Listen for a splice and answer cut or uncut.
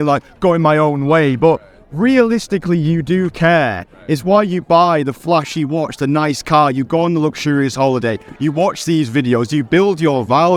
uncut